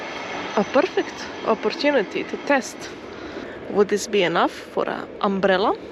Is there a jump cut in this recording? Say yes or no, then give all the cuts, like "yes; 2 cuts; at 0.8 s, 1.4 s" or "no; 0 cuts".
yes; 1 cut; at 3.5 s